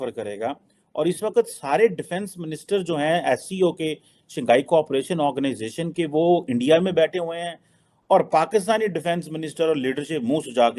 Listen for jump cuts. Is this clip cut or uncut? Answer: uncut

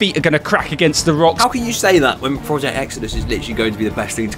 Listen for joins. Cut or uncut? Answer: cut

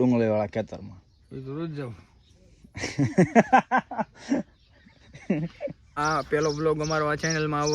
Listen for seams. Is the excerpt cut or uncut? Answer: cut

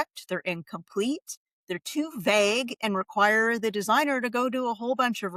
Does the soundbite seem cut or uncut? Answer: uncut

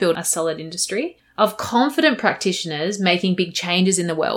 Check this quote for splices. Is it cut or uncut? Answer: cut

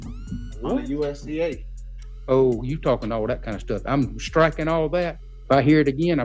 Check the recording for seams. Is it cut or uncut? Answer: cut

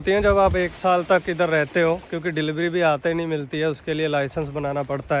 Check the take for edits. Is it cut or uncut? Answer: uncut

